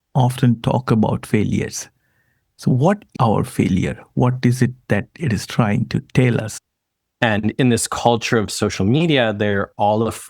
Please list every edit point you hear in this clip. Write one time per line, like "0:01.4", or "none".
0:06.5

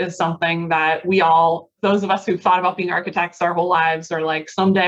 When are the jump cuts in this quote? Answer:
0:01.7

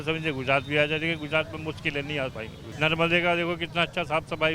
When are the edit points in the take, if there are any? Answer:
0:02.6

